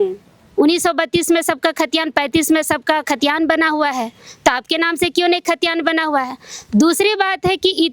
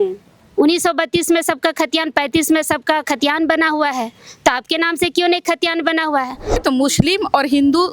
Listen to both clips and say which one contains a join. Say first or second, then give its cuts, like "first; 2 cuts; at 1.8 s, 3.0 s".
second; 1 cut; at 6.6 s